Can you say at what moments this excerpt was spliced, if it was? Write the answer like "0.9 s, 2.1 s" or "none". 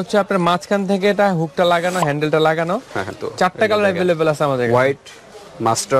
3.1 s